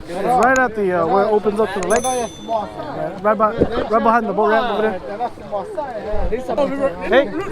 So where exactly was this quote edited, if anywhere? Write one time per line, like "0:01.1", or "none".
0:06.6

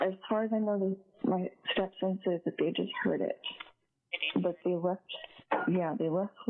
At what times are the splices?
0:04.6

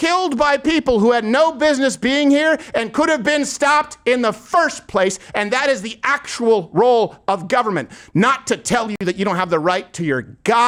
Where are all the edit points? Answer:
none

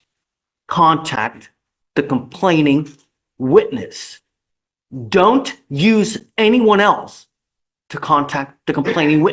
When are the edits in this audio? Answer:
none

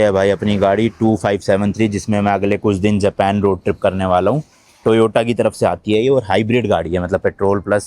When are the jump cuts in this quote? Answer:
none

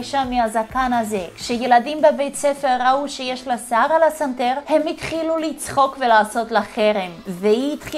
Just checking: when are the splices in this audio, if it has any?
none

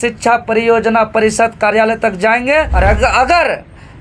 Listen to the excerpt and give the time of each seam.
0:02.7

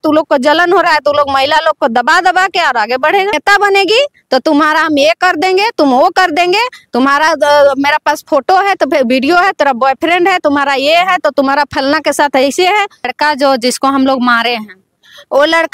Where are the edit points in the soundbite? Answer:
0:03.4
0:13.1

